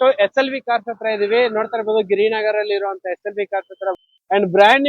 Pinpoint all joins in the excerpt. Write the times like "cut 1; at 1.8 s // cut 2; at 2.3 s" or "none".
cut 1; at 4.0 s